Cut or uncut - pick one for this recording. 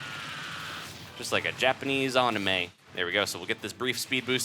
cut